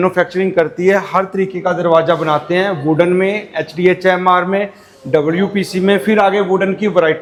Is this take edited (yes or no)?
no